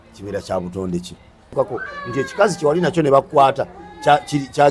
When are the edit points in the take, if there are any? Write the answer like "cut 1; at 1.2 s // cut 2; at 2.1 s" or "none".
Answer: cut 1; at 1.5 s